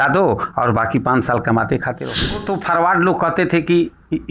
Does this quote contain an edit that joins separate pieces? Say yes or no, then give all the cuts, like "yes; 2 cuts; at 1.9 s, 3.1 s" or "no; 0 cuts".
yes; 1 cut; at 2.5 s